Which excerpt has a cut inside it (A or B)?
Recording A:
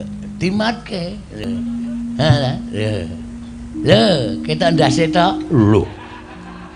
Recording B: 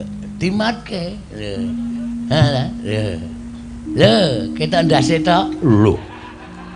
A